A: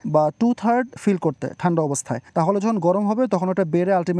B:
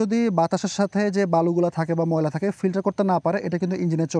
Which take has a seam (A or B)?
A